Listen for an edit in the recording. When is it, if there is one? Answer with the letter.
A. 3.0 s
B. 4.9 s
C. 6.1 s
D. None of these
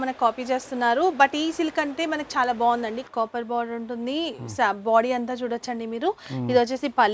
A